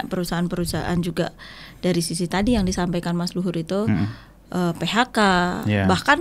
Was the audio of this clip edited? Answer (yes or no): no